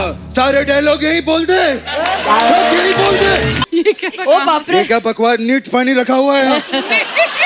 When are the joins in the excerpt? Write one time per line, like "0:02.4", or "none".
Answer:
0:03.6